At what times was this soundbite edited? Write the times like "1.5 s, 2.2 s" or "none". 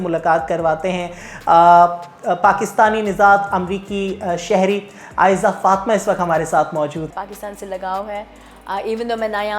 7.1 s